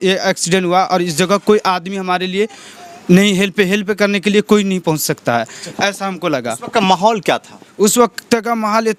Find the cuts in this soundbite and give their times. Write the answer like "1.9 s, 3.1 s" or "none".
none